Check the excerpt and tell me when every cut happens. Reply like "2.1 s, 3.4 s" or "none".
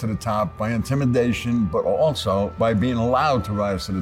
2.5 s